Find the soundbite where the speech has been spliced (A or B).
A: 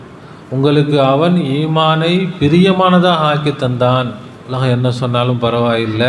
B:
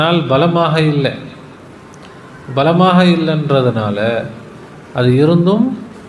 A